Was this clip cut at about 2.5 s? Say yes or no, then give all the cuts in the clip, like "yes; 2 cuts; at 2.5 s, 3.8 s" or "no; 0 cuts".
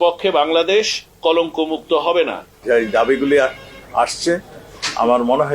yes; 1 cut; at 2.5 s